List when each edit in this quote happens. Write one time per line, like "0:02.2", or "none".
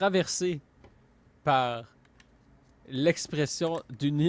none

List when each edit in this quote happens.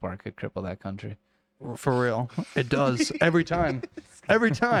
none

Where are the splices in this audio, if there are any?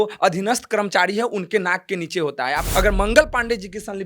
0:02.6

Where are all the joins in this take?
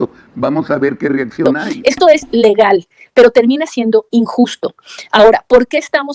0:01.6

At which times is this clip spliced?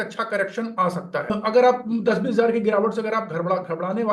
0:01.4

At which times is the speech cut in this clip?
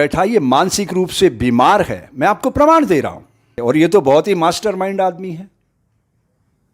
0:03.5

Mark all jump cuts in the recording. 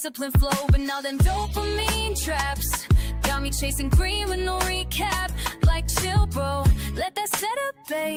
none

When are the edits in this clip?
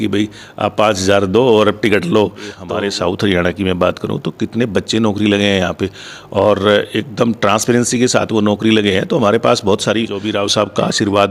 0:02.6
0:10.2

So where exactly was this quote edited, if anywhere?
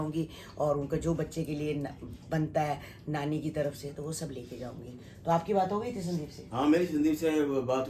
none

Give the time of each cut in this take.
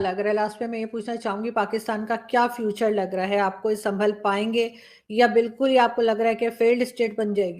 none

